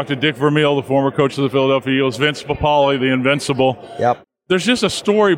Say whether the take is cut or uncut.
cut